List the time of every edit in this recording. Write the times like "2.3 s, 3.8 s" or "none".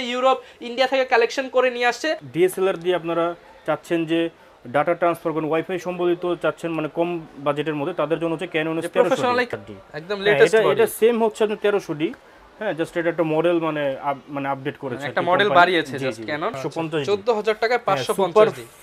2.2 s, 9.5 s, 16.6 s